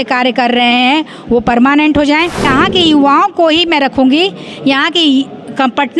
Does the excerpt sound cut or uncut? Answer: cut